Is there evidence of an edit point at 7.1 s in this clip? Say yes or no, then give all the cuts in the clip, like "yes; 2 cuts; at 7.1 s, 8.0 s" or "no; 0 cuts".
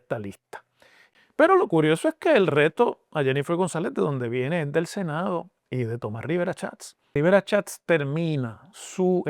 yes; 2 cuts; at 0.9 s, 7.1 s